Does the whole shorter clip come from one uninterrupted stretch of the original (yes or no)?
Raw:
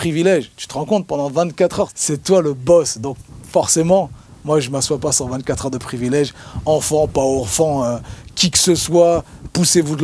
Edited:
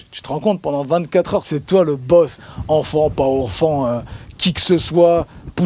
no